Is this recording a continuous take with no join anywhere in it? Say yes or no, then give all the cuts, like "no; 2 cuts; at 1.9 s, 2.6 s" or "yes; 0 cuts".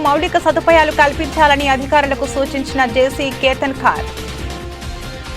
no; 1 cut; at 4.1 s